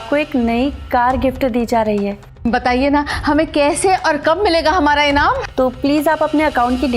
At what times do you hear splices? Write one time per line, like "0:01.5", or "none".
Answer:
0:02.3
0:05.4